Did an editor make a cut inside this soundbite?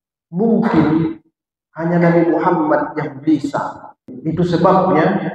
yes; 1 cut; at 4.0 s

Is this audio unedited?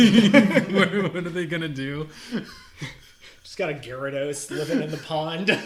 yes; 0 cuts

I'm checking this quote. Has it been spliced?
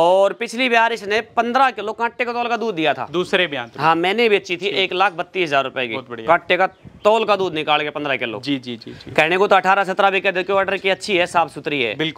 no; 0 cuts

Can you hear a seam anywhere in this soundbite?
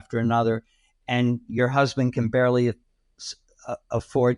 no; 0 cuts

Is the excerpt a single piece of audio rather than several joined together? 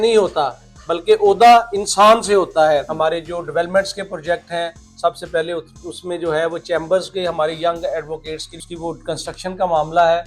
no; 2 cuts; at 2.9 s, 8.7 s

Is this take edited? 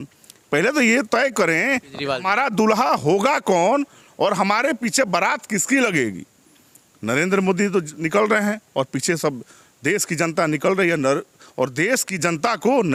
no; 0 cuts

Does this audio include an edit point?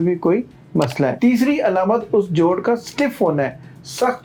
no; 0 cuts

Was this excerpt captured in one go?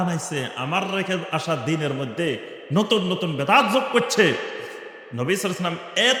yes; 0 cuts

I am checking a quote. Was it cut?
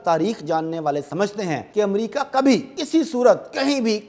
yes; 2 cuts; at 1.6 s, 2.7 s

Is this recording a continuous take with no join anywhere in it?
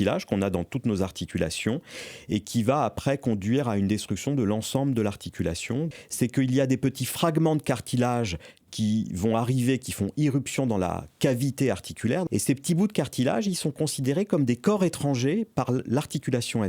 no; 2 cuts; at 5.9 s, 12.3 s

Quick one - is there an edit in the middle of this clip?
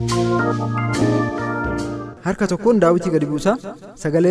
yes; 1 cut; at 2.0 s

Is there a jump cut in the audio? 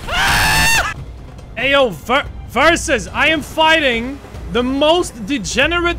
yes; 1 cut; at 0.9 s

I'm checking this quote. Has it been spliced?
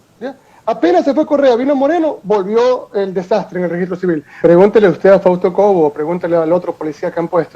yes; 1 cut; at 4.4 s

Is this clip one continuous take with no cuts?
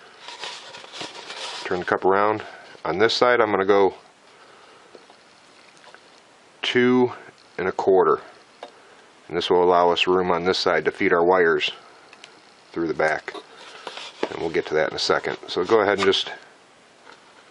no; 1 cut; at 4.9 s

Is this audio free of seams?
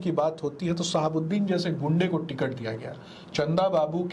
yes; 0 cuts

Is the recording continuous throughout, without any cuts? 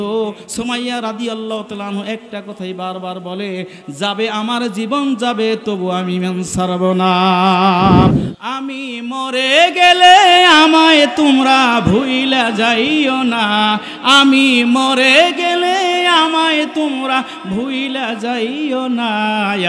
no; 1 cut; at 8.1 s

